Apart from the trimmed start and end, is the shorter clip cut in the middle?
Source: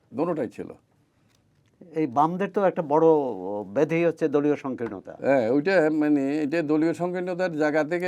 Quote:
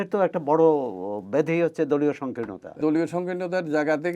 yes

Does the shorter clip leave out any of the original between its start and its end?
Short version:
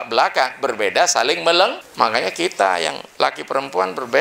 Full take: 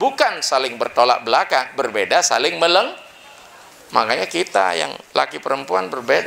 yes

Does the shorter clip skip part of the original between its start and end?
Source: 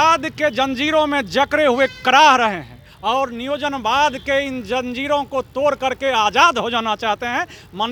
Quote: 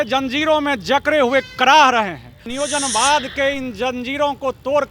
yes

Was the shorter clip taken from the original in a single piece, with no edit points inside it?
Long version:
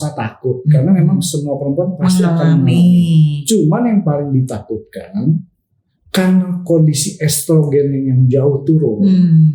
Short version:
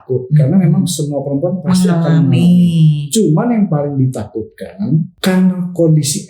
no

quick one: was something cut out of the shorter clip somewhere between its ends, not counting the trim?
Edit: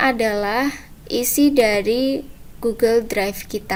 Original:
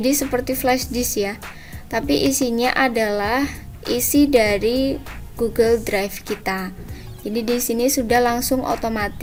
no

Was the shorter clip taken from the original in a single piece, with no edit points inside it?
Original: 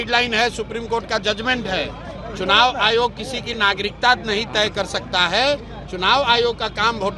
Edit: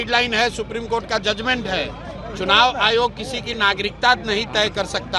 yes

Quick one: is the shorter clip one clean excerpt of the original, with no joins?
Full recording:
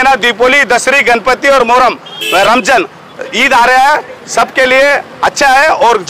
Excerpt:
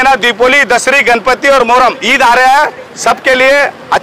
no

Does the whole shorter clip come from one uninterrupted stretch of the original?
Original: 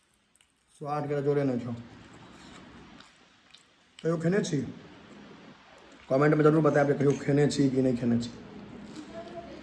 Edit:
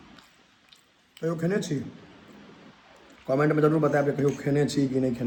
yes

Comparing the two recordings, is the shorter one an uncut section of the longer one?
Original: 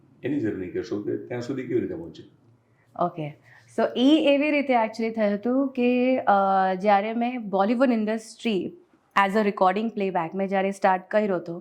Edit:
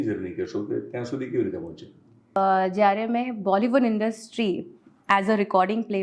no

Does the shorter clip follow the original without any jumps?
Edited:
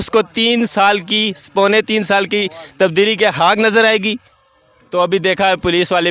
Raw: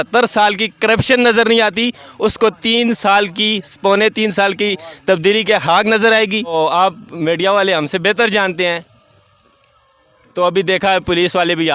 no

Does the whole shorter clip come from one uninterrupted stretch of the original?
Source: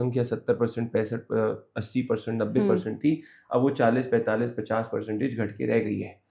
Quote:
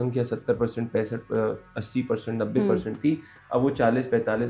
yes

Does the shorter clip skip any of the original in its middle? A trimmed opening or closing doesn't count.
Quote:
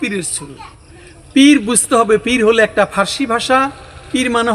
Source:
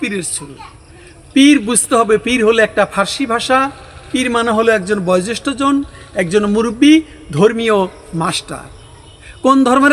no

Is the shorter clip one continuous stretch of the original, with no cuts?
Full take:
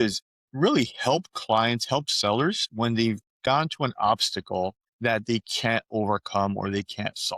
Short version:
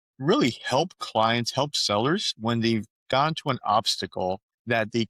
yes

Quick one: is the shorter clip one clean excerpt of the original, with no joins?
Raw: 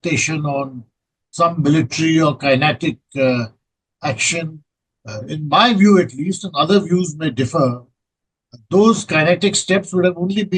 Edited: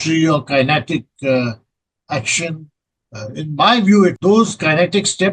no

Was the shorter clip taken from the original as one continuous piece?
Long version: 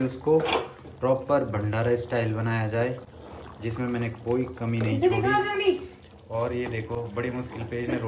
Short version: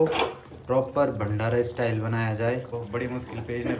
no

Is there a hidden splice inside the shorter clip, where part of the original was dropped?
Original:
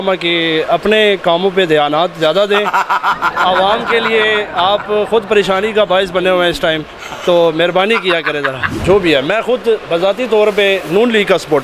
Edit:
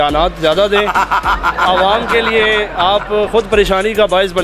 no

